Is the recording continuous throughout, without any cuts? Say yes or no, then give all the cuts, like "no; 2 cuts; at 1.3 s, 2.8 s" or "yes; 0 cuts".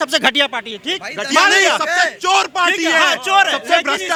yes; 0 cuts